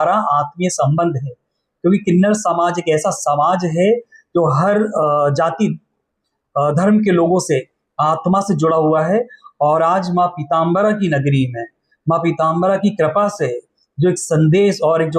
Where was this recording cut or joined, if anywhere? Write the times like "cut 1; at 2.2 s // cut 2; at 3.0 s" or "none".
none